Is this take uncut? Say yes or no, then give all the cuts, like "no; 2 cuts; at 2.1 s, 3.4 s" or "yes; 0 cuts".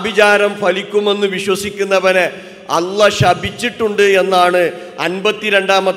yes; 0 cuts